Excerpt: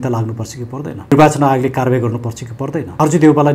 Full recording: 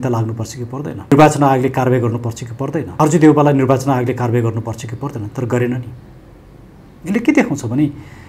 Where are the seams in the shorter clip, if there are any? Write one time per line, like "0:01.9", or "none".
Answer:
none